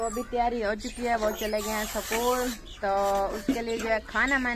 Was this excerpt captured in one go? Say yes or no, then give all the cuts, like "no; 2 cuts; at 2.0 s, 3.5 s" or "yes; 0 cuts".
yes; 0 cuts